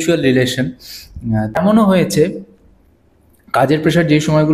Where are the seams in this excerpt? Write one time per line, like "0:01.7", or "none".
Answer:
0:01.5